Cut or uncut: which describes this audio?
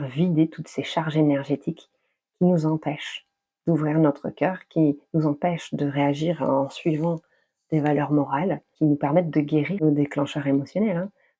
cut